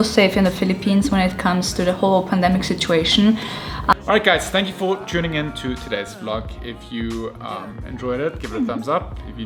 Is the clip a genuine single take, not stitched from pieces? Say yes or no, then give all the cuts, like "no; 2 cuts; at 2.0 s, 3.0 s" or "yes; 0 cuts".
yes; 0 cuts